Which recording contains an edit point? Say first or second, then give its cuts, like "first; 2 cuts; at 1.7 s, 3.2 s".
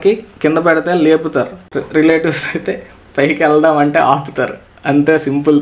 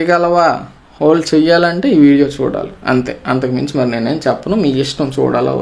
first; 1 cut; at 1.6 s